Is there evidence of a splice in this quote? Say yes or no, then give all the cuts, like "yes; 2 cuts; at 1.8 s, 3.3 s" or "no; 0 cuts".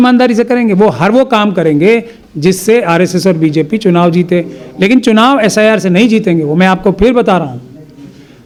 no; 0 cuts